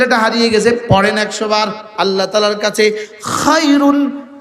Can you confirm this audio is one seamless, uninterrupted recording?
no; 1 cut; at 2.3 s

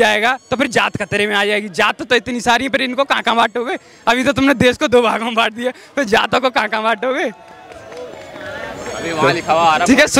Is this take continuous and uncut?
yes; 0 cuts

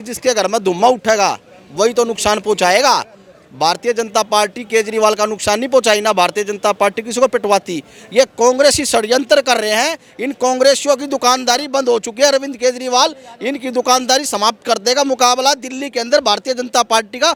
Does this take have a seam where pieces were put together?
no; 0 cuts

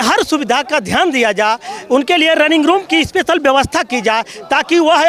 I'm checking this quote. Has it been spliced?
no; 0 cuts

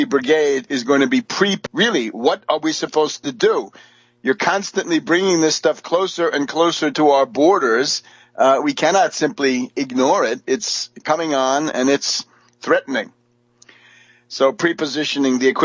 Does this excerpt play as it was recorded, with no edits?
yes; 0 cuts

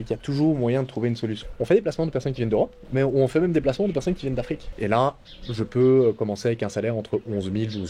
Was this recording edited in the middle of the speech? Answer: yes; 2 cuts; at 1.4 s, 4.6 s

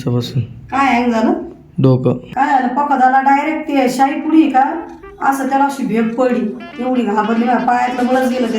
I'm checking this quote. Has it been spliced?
yes; 1 cut; at 2.2 s

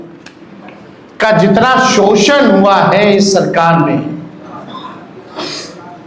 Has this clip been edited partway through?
no; 0 cuts

